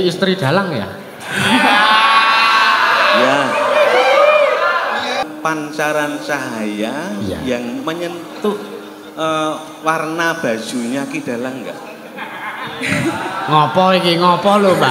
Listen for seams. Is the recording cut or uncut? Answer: cut